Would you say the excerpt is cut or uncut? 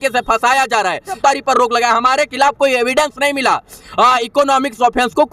cut